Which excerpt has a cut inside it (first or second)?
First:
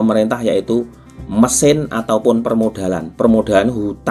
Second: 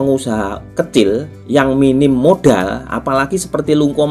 second